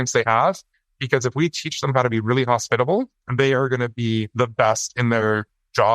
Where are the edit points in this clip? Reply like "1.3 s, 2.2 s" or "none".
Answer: 3.2 s, 4.3 s